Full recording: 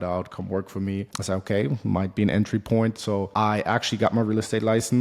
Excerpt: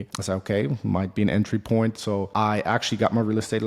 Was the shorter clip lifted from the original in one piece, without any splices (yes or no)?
yes